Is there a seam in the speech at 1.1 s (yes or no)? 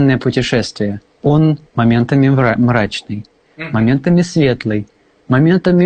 yes